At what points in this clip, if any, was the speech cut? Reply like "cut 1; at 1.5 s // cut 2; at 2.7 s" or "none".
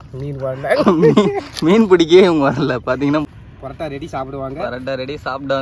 cut 1; at 3.3 s